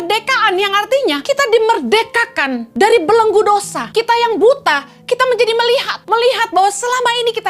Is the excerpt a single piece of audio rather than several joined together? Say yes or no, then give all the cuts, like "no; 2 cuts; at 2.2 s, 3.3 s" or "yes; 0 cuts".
no; 4 cuts; at 1.2 s, 2.6 s, 3.8 s, 5.9 s